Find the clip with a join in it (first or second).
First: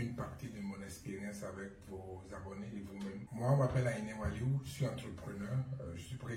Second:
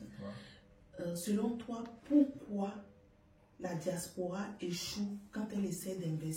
first